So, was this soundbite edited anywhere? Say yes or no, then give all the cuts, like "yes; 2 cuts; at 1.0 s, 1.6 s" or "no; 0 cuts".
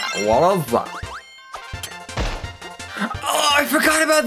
yes; 1 cut; at 1.0 s